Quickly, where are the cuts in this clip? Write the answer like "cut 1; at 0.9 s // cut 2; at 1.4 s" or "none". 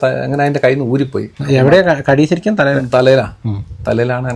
none